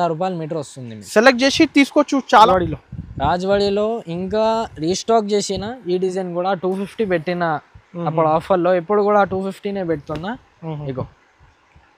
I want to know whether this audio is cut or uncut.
cut